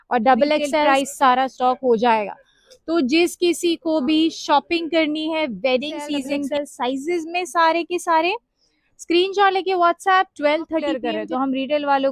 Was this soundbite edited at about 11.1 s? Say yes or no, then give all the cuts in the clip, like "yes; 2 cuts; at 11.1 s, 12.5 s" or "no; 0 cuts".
yes; 3 cuts; at 0.9 s, 6.5 s, 11.1 s